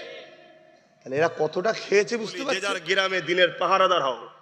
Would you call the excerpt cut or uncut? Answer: cut